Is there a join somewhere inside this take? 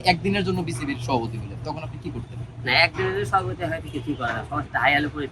no; 0 cuts

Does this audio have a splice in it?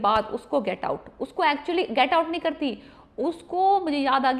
no; 0 cuts

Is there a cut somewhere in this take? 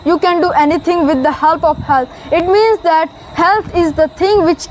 no; 0 cuts

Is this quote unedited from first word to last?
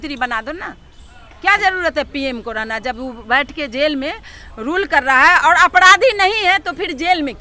yes; 0 cuts

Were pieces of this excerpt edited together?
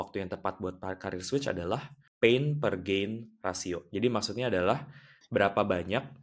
yes; 2 cuts; at 2.0 s, 3.9 s

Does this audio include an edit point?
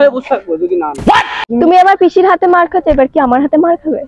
yes; 1 cut; at 1.5 s

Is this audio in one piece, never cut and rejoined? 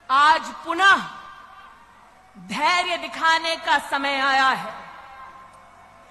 yes; 0 cuts

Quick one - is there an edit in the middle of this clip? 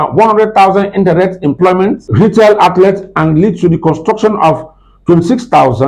yes; 1 cut; at 2.0 s

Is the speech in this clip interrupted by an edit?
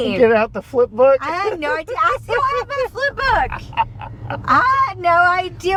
no; 0 cuts

